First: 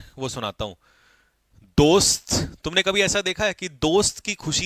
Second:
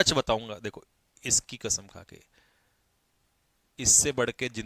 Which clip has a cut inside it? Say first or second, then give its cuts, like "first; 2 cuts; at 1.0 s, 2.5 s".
first; 1 cut; at 1.7 s